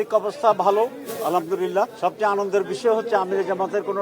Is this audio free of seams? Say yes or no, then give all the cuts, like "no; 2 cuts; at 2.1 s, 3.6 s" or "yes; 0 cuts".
no; 1 cut; at 1.9 s